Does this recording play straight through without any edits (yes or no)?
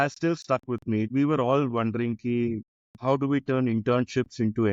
no